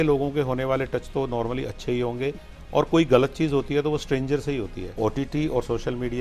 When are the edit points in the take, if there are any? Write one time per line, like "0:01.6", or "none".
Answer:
0:04.9